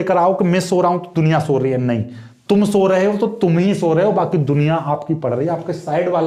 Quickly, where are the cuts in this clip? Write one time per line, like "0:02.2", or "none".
none

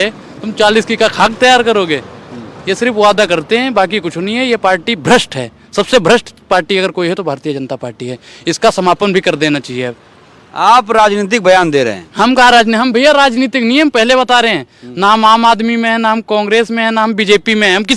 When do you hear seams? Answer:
none

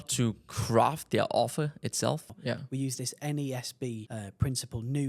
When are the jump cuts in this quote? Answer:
0:02.3
0:04.1

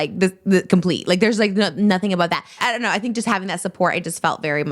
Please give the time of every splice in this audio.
0:02.5

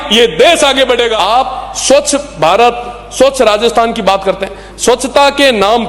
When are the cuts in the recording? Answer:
0:01.1

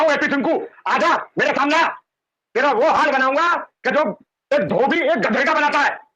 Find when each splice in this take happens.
none

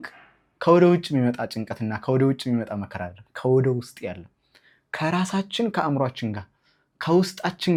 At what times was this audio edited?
none

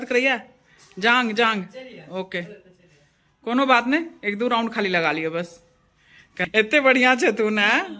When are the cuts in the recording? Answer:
0:06.3

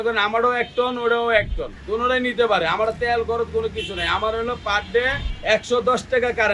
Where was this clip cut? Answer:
none

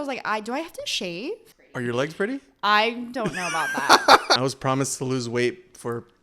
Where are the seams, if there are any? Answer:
0:01.5
0:04.4

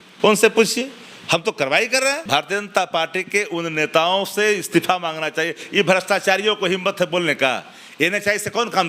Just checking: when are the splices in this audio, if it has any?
0:02.2

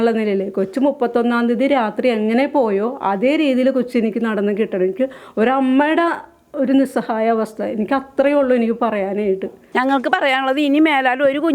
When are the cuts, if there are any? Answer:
0:09.6

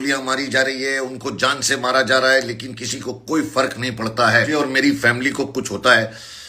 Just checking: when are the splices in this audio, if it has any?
0:04.5

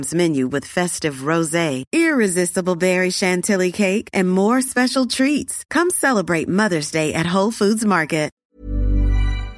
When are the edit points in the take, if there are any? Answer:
0:08.4

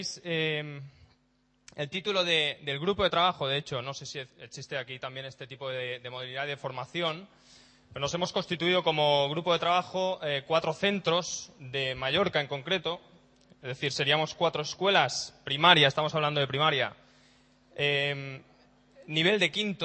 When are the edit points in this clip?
0:07.2

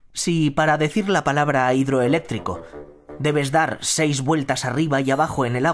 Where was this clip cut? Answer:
0:03.8

